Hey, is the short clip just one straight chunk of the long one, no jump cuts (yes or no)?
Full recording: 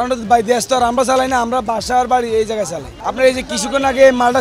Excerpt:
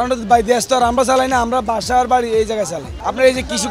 yes